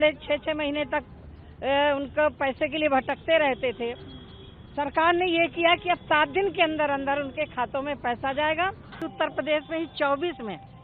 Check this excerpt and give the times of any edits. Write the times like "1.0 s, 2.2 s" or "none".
9.1 s